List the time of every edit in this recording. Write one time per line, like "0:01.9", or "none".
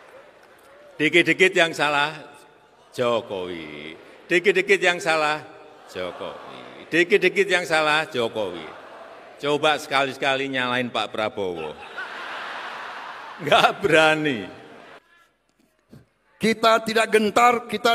0:15.0